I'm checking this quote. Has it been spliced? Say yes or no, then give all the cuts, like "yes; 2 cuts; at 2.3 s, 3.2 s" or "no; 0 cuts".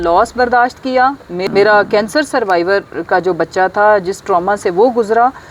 yes; 1 cut; at 1.3 s